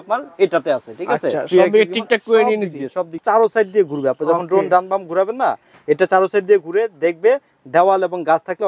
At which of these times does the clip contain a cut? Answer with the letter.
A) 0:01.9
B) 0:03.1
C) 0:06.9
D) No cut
B